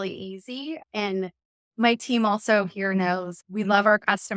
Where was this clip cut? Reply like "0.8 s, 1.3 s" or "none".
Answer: 0.8 s, 3.3 s